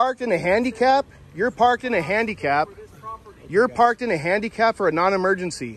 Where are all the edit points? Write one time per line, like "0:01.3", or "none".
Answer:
none